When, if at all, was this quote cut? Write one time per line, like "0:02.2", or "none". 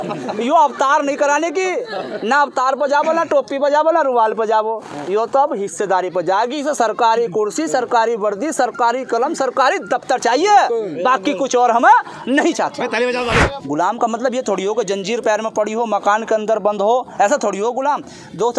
0:13.6